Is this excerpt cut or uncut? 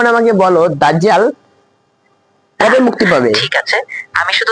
uncut